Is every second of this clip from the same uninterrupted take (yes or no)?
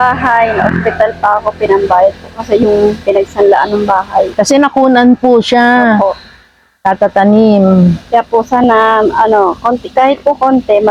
yes